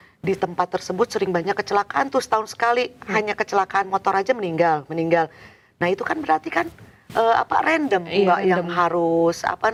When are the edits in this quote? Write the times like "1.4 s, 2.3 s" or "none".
none